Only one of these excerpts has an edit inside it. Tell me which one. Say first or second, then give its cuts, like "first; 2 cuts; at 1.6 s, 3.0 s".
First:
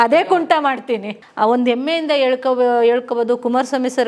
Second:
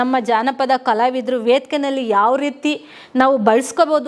first; 1 cut; at 1.2 s